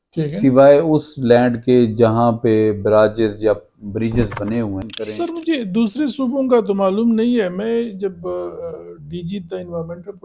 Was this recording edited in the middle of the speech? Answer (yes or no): yes